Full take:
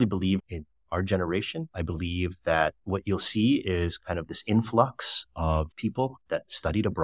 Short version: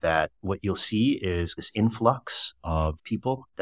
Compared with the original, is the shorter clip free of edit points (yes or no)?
no